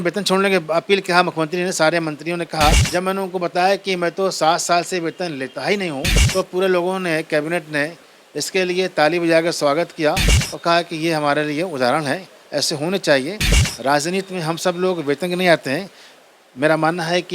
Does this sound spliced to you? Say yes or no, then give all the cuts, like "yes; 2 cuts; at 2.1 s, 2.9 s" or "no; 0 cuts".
yes; 2 cuts; at 2.8 s, 6.2 s